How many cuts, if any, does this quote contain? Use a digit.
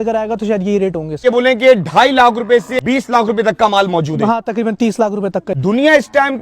3